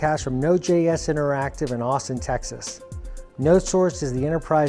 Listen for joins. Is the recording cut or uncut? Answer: uncut